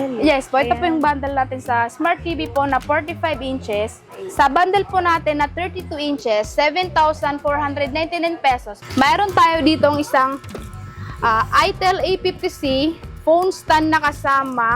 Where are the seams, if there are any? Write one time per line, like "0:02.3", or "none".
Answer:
0:04.2
0:08.7